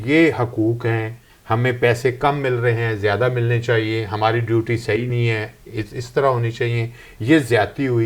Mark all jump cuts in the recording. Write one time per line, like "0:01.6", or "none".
none